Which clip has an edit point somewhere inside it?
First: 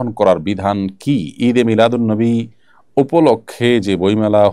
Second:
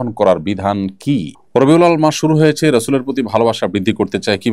second; 1 cut; at 1.3 s

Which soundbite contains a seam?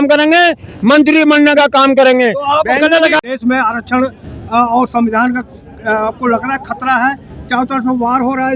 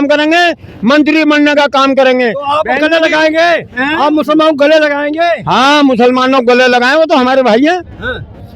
first; 1 cut; at 3.2 s

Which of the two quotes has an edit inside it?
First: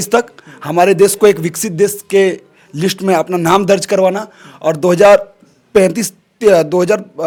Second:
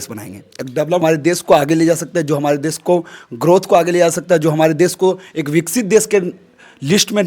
second; 1 cut; at 1.0 s

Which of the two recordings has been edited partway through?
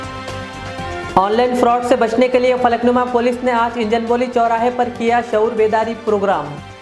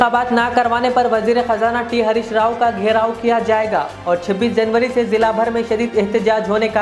first; 1 cut; at 1.1 s

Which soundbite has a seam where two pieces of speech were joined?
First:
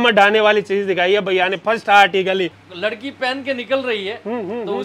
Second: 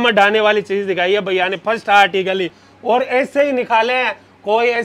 first; 1 cut; at 2.6 s

